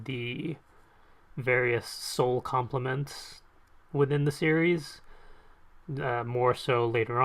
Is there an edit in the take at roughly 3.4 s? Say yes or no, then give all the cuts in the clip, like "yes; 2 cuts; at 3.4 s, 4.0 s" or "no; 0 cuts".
yes; 1 cut; at 3.4 s